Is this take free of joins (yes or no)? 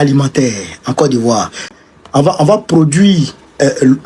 no